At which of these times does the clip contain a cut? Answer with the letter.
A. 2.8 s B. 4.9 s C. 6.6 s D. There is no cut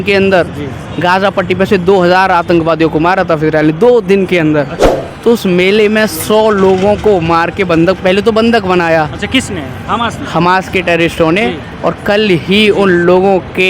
B